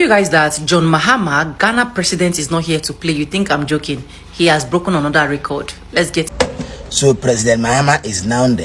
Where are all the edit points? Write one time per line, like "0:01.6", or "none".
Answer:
0:06.3